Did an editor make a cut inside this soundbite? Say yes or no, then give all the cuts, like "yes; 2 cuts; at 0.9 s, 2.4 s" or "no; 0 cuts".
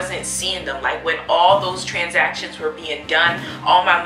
no; 0 cuts